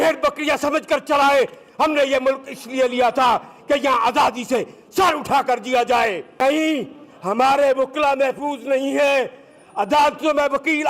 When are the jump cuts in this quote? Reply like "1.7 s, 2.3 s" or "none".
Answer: 6.4 s